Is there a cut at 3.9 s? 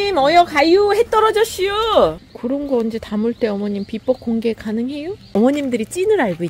no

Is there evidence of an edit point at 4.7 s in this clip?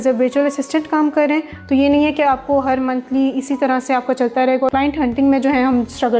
yes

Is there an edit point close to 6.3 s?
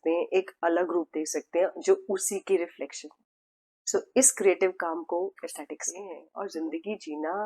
yes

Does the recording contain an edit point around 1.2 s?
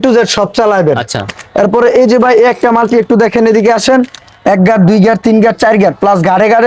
no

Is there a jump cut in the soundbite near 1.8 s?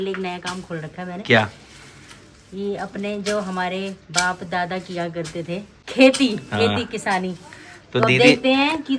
no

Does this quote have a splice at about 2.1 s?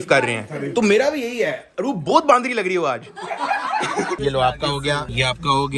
no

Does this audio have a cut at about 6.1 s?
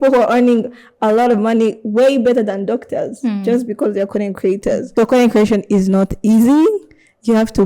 no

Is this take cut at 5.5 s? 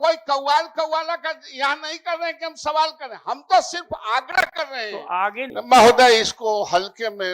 yes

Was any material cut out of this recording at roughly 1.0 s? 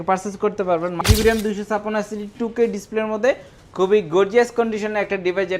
yes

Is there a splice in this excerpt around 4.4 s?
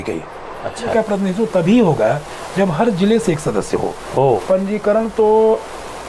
yes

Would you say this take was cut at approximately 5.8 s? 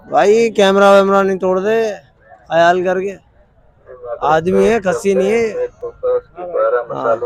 no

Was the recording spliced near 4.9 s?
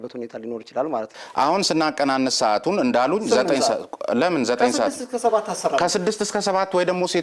no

